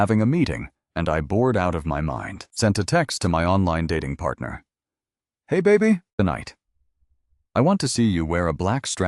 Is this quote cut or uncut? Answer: cut